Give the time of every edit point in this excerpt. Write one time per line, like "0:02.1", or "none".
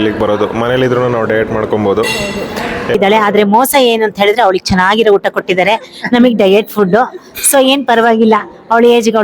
0:02.9